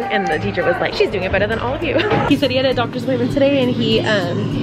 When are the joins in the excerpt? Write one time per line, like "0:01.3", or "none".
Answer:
0:00.9
0:02.3